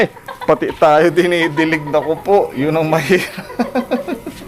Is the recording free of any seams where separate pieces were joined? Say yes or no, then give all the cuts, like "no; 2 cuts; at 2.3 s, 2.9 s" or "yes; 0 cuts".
yes; 0 cuts